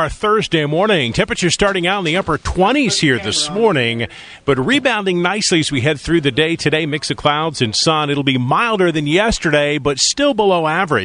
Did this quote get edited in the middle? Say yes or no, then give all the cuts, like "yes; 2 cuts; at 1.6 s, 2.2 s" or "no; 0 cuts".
yes; 1 cut; at 10.1 s